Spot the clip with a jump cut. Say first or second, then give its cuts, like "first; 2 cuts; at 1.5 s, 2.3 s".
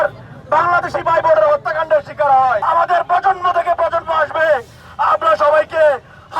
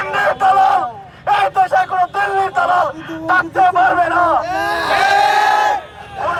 first; 1 cut; at 2.6 s